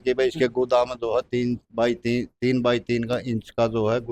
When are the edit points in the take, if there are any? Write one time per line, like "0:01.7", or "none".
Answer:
none